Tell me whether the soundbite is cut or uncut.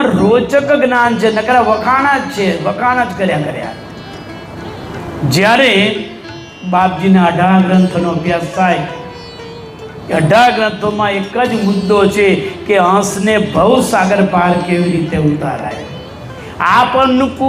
uncut